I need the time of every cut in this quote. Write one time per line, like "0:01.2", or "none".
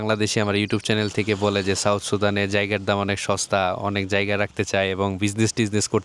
none